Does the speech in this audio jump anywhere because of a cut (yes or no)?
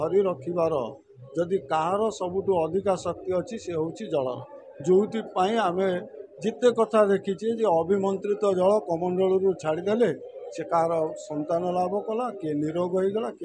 no